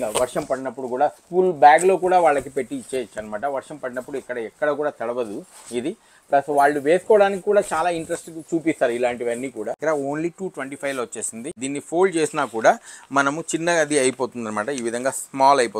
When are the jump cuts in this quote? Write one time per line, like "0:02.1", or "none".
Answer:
0:09.8
0:11.6